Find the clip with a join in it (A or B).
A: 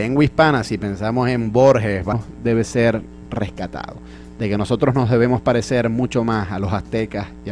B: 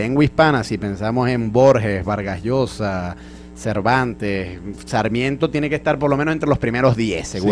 B